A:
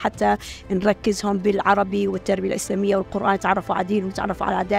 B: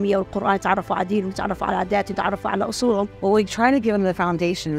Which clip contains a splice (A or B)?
B